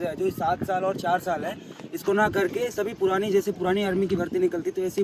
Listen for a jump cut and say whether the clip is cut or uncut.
uncut